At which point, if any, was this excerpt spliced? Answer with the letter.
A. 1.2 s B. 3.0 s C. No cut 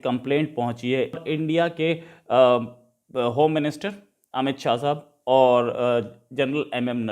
A